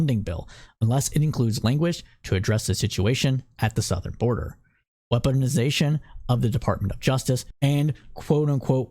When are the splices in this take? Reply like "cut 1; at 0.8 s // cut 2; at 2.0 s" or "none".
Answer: cut 1; at 7.5 s